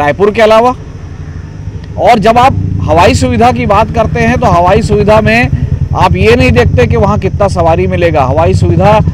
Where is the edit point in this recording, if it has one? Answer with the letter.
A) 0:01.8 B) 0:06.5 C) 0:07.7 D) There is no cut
D